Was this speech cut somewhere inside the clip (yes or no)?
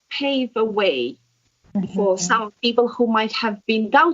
no